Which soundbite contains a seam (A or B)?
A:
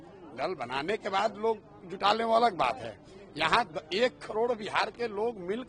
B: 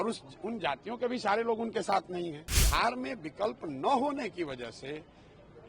B